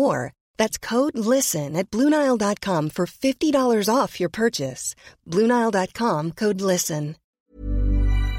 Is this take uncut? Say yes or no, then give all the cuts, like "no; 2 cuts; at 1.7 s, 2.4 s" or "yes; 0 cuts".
no; 1 cut; at 7.2 s